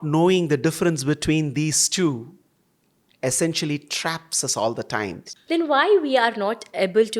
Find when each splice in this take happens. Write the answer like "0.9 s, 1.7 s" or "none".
5.3 s